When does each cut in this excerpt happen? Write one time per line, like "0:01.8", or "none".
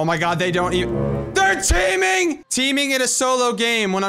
0:02.5